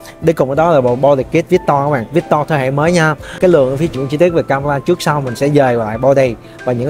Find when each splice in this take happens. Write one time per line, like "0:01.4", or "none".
0:03.9